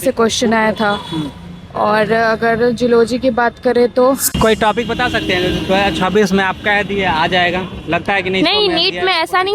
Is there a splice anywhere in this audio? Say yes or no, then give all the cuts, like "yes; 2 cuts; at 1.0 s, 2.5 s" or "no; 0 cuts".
yes; 1 cut; at 4.3 s